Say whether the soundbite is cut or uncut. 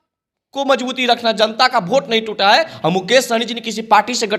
uncut